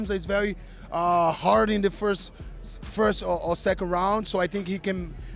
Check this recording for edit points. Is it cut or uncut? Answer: uncut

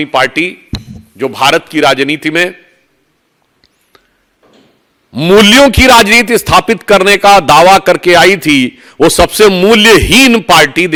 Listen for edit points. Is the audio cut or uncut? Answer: uncut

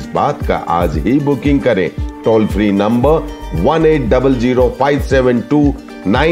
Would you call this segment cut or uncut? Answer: uncut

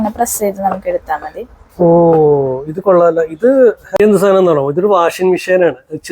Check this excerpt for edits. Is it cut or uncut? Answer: cut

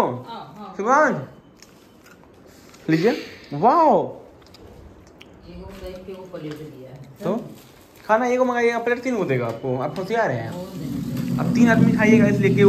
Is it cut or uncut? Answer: uncut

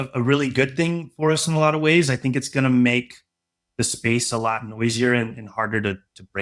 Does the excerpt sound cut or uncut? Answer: uncut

